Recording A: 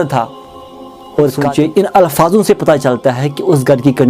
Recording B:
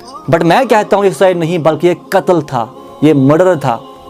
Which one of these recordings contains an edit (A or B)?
A